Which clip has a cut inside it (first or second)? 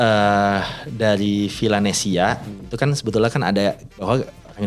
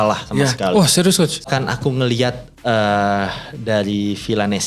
second